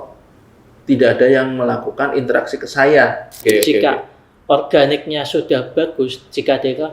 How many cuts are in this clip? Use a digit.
1